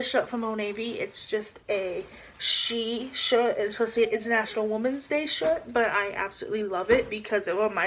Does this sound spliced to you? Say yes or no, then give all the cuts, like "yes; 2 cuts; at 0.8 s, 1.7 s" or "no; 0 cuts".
no; 0 cuts